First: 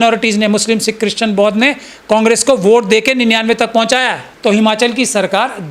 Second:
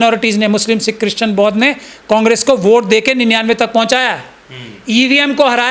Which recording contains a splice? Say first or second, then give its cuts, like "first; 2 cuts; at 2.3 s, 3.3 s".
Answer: first; 1 cut; at 4.2 s